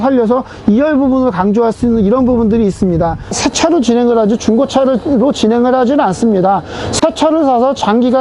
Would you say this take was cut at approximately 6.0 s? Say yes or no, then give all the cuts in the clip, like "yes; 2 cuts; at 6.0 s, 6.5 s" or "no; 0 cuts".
no; 1 cut; at 3.4 s